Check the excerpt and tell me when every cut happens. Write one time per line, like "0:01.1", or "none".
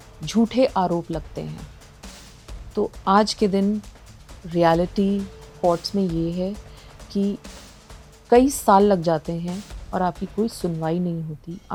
none